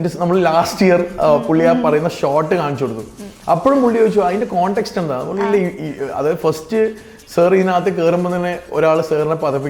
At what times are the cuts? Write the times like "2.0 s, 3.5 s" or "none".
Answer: none

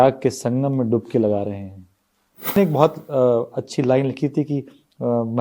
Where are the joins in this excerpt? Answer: 2.6 s

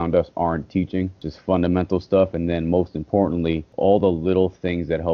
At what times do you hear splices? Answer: 1.3 s, 3.7 s

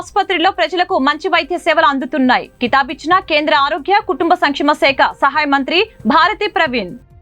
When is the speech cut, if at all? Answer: none

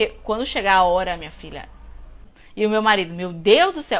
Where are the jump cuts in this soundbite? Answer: 2.6 s

